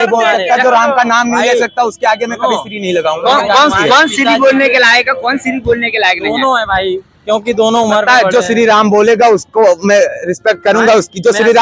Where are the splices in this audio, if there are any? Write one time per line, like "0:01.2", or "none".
none